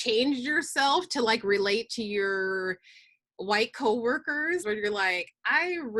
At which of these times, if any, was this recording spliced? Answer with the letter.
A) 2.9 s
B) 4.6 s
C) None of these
B